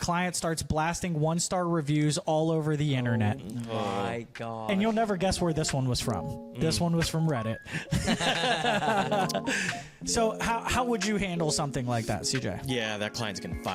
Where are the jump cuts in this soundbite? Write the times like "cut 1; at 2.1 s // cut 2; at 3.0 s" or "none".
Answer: none